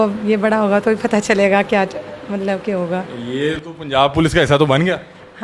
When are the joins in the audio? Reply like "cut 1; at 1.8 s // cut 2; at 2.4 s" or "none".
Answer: none